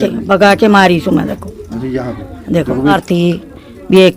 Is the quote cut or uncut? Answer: cut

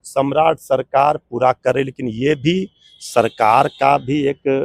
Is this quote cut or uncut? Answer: uncut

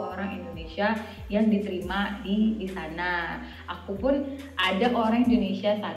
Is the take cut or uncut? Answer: uncut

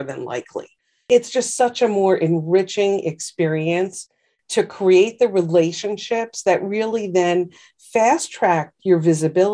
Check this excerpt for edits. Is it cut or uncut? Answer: cut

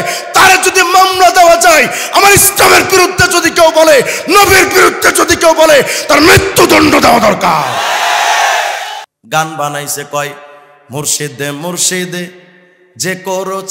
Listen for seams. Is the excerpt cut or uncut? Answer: cut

